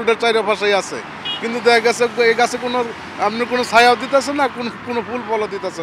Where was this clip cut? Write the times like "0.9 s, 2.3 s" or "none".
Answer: none